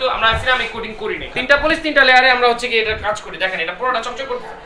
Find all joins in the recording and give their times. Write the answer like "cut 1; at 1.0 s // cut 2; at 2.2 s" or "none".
cut 1; at 1.2 s

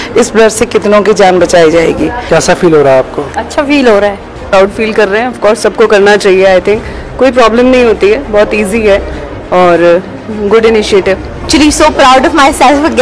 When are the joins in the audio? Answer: cut 1; at 2.1 s // cut 2; at 4.4 s // cut 3; at 11.5 s

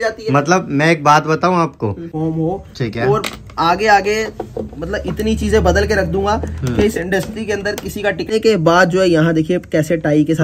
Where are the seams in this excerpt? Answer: cut 1; at 2.1 s // cut 2; at 8.3 s

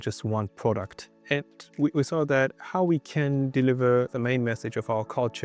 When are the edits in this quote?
cut 1; at 1.5 s // cut 2; at 4.1 s

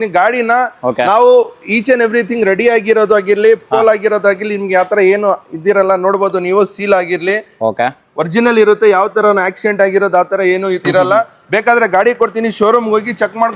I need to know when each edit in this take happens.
none

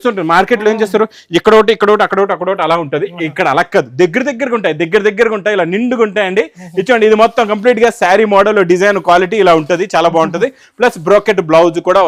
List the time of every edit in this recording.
none

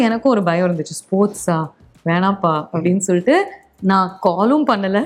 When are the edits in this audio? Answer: none

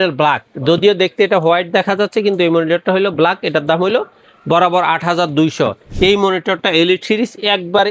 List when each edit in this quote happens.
cut 1; at 5.8 s

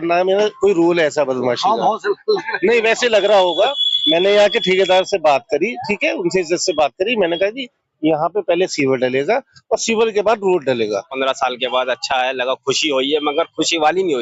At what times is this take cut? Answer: cut 1; at 11.1 s

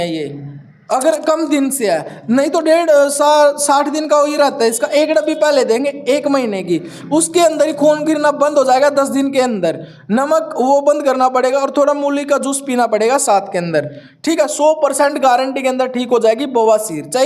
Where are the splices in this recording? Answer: none

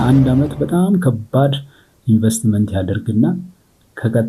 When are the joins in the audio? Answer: none

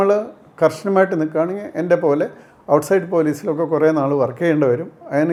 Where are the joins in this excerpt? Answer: none

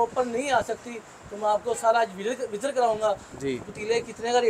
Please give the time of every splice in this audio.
none

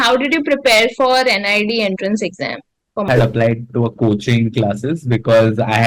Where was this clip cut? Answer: cut 1; at 3.1 s

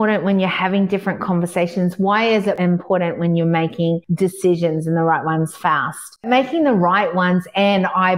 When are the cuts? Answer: cut 1; at 2.6 s // cut 2; at 4.1 s // cut 3; at 6.2 s

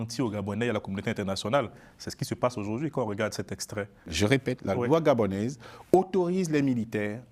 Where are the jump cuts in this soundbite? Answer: cut 1; at 4.0 s

